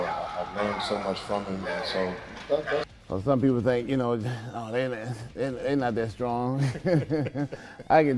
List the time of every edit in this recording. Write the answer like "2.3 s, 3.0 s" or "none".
2.8 s